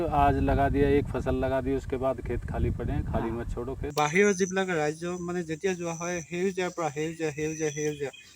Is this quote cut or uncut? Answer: cut